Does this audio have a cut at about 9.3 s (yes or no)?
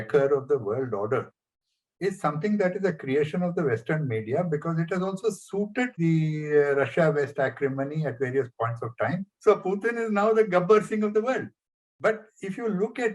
yes